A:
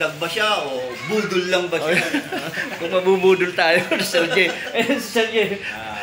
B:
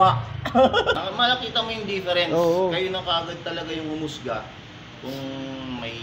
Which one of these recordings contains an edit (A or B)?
B